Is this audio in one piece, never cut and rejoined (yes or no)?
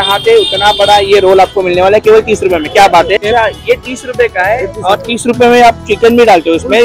no